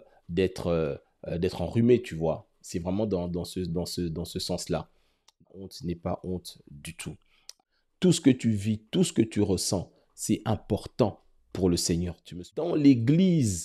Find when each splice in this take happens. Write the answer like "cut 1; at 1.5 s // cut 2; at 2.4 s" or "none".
cut 1; at 5.4 s // cut 2; at 7.5 s // cut 3; at 12.6 s